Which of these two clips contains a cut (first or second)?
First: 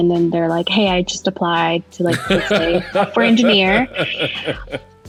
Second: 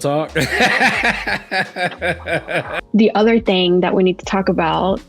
second